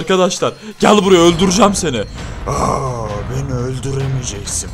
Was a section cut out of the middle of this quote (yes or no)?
no